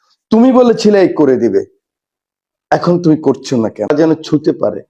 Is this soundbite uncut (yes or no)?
no